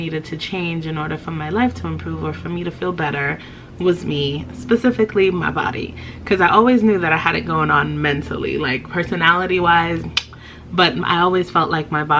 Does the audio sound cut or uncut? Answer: uncut